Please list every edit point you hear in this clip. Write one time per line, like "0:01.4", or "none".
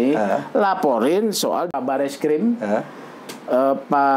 0:01.8